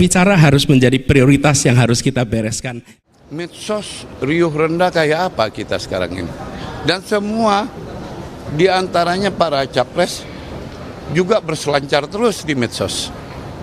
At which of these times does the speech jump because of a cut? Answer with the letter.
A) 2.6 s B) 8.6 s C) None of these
A